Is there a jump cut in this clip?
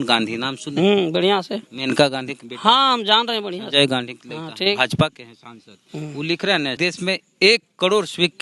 yes; 1 cut; at 6.8 s

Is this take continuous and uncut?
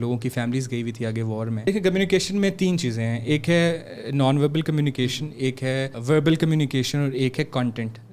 no; 2 cuts; at 1.6 s, 6.0 s

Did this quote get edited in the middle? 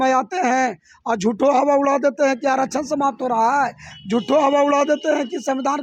no; 0 cuts

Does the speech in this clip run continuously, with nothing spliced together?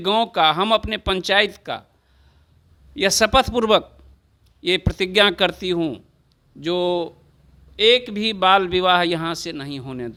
yes; 0 cuts

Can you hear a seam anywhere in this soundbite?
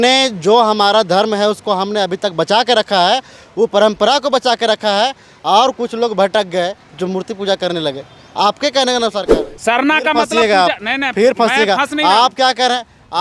yes; 1 cut; at 9.3 s

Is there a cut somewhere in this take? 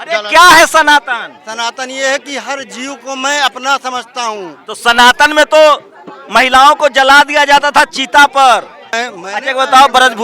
yes; 1 cut; at 8.8 s

